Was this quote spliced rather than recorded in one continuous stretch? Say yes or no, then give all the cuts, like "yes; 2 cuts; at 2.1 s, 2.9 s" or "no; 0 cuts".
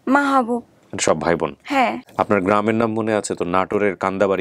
yes; 1 cut; at 2.0 s